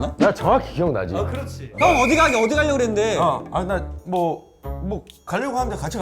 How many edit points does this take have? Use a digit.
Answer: 1